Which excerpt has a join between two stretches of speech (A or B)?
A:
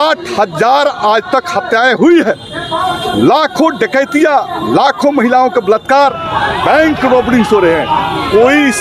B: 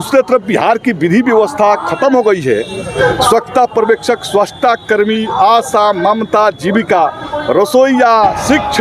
B